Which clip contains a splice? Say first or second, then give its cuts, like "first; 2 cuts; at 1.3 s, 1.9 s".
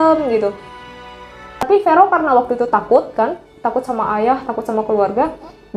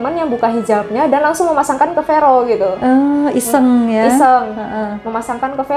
first; 1 cut; at 1.6 s